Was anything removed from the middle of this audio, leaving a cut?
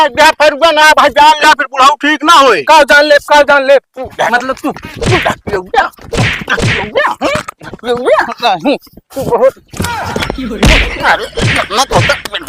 no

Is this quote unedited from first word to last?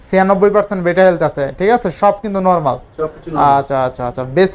yes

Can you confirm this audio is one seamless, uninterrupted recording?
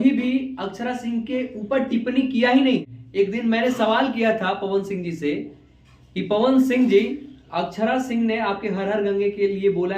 no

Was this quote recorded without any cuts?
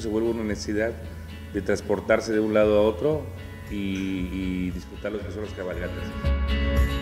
no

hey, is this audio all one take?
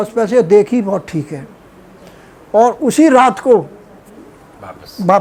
yes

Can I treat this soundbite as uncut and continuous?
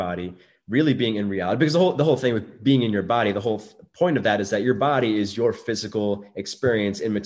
yes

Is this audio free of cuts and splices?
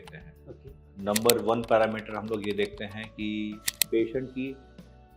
no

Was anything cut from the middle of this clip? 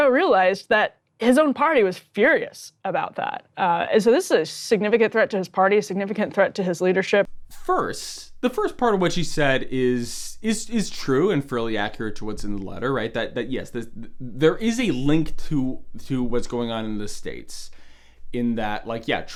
no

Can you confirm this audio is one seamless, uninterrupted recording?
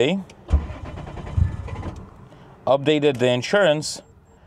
yes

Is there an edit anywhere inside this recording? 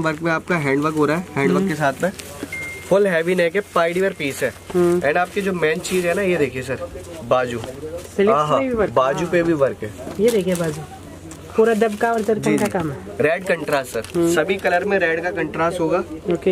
no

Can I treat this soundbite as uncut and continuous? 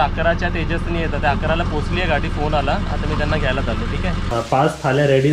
no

